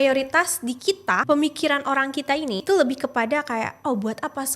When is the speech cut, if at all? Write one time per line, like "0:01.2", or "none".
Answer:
0:01.2
0:02.6